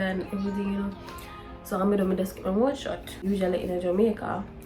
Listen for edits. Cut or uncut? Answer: cut